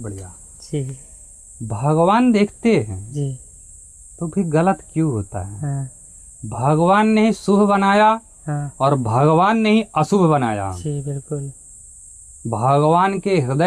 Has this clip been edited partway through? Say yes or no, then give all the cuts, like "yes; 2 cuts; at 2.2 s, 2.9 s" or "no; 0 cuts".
no; 0 cuts